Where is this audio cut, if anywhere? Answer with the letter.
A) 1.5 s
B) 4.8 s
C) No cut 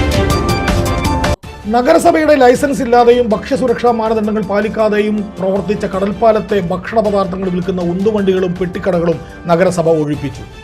A